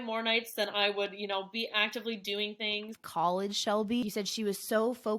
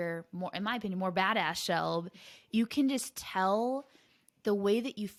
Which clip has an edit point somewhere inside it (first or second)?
first